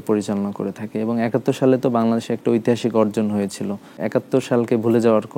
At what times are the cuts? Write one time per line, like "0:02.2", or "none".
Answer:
0:04.0

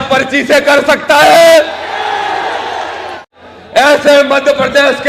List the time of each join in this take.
0:03.2

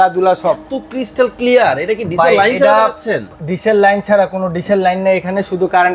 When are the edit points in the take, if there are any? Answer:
none

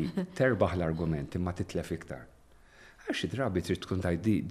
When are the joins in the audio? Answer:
none

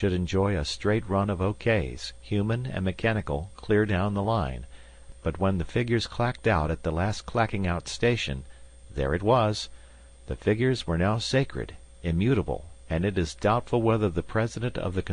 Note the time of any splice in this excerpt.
0:13.1

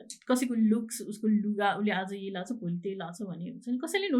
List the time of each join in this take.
none

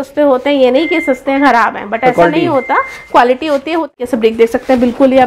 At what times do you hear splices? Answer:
0:04.0

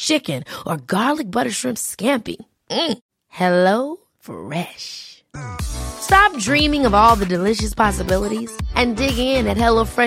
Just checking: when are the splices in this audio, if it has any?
none

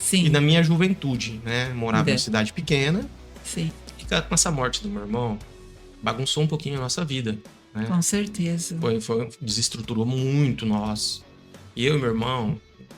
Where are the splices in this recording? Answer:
0:03.8

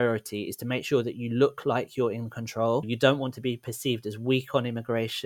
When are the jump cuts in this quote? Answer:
0:02.9

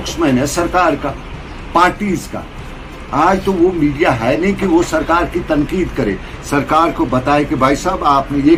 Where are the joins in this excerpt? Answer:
none

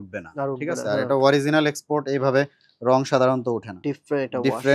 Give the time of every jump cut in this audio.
0:03.7

